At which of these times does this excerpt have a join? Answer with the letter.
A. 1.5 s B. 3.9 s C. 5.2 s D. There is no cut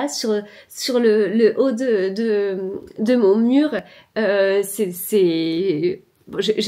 D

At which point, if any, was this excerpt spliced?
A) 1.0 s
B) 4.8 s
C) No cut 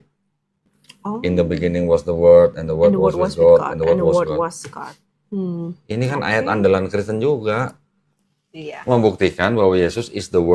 A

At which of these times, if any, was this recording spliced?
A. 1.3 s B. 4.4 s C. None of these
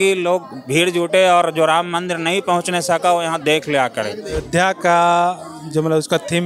B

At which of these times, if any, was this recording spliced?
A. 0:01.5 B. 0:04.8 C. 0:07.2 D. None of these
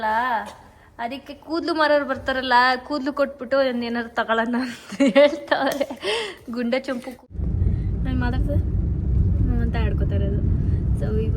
C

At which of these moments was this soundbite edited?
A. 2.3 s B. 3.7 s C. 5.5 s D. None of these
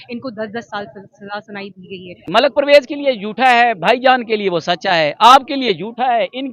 A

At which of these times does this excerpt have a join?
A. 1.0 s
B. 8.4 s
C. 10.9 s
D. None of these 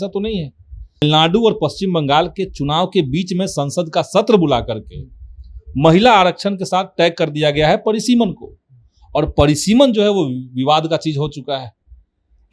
A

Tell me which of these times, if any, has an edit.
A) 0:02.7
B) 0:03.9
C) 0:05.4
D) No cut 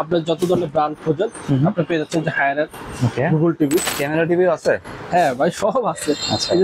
B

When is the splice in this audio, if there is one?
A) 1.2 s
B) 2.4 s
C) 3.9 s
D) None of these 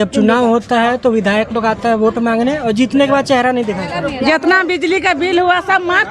C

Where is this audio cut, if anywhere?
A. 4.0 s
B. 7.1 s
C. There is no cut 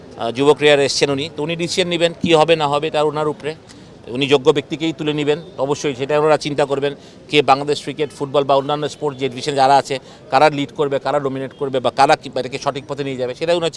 C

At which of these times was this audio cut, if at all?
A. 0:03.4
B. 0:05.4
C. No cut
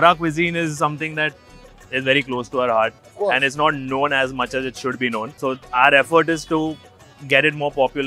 B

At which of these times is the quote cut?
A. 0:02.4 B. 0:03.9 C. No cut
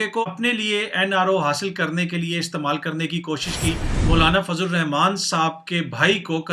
B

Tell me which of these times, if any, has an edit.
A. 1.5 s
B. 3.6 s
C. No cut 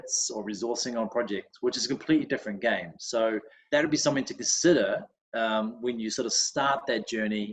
B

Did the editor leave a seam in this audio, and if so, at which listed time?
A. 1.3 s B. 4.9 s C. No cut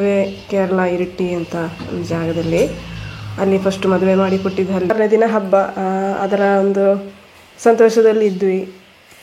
B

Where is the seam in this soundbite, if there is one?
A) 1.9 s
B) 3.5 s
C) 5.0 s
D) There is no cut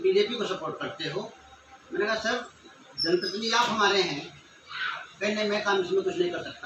D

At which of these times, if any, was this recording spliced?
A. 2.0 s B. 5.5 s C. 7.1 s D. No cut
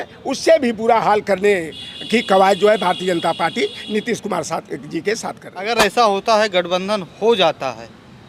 B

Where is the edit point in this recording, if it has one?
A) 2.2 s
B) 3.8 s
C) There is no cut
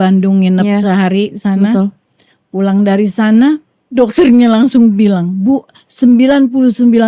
B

